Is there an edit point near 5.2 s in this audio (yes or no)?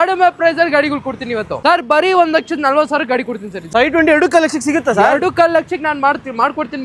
no